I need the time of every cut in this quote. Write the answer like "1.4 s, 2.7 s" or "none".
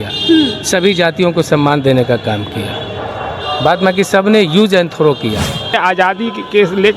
5.8 s